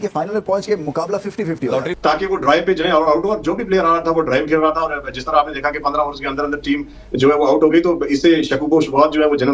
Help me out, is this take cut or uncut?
cut